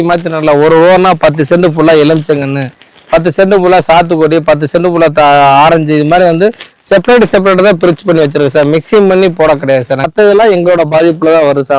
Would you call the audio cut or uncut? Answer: cut